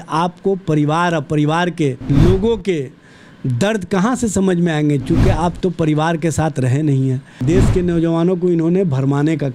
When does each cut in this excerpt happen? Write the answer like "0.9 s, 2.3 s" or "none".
2.0 s, 7.4 s